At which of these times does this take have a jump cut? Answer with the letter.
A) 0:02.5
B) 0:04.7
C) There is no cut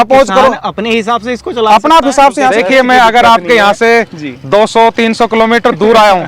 A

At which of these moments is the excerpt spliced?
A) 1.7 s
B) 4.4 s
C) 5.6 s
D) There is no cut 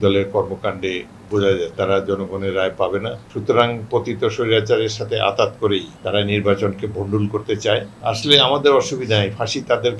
A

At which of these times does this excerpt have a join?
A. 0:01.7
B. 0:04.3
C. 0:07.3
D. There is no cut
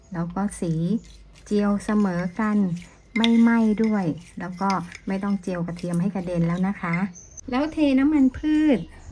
C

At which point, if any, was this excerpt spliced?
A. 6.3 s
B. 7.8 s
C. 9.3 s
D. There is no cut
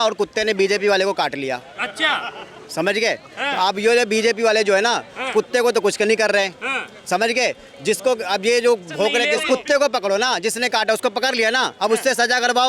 C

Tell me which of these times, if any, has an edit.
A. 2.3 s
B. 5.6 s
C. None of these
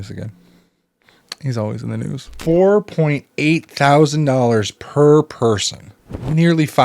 A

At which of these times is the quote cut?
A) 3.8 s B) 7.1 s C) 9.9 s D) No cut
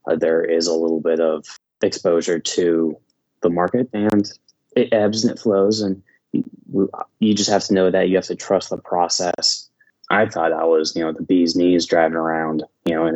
C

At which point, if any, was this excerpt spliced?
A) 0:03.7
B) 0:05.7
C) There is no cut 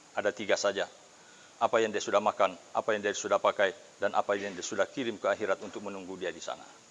C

